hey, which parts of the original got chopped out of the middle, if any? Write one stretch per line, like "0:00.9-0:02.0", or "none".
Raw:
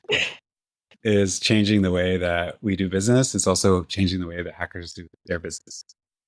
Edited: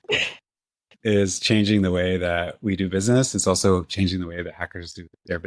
none

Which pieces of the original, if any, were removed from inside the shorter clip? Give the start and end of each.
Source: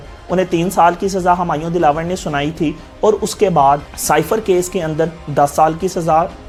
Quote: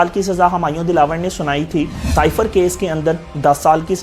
0:02.9-0:03.9

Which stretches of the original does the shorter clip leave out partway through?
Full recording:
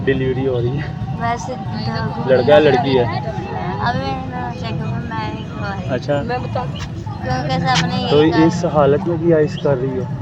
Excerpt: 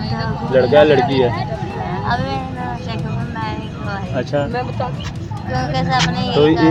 none

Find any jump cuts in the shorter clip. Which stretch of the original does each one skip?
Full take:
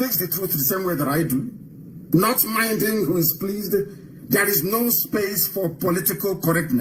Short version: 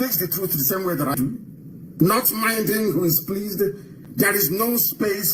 0:01.1-0:01.3

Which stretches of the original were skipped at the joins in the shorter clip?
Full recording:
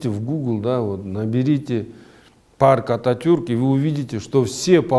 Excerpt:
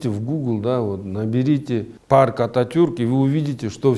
0:01.9-0:02.4

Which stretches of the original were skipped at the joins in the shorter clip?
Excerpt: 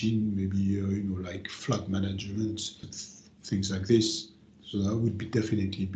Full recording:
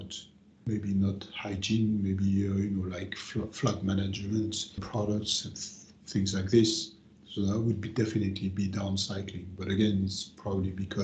0:03.2-0:03.5
0:04.7-0:05.4

